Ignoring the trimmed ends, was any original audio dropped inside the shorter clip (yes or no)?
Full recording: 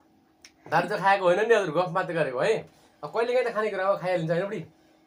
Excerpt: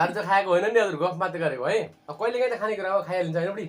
yes